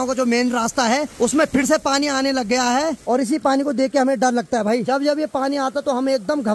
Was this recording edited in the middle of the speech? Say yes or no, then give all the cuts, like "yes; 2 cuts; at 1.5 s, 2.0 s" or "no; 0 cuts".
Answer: yes; 3 cuts; at 1.1 s, 3.0 s, 4.8 s